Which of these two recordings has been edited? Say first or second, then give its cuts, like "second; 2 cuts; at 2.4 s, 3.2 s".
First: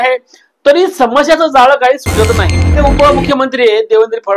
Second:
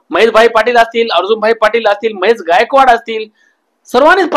first; 1 cut; at 2.8 s